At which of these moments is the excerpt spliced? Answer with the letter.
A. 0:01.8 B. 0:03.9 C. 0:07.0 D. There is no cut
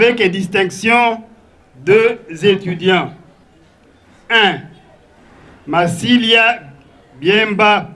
D